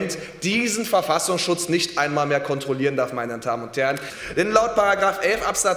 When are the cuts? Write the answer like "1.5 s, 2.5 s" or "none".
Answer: 4.1 s